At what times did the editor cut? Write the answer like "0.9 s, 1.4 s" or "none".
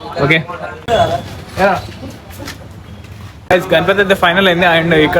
0.8 s, 3.3 s